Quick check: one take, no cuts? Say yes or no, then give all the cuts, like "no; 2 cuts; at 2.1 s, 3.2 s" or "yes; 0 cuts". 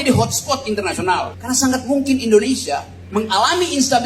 no; 2 cuts; at 1.4 s, 3.0 s